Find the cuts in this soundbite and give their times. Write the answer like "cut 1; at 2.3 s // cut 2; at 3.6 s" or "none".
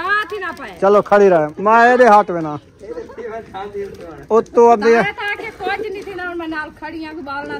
cut 1; at 1.5 s

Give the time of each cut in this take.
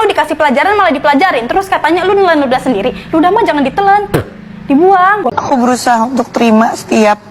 cut 1; at 5.3 s

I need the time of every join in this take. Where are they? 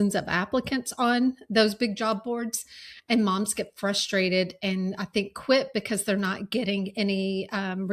none

